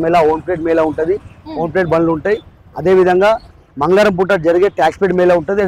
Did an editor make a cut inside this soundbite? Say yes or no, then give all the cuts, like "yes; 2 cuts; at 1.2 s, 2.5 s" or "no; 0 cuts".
no; 0 cuts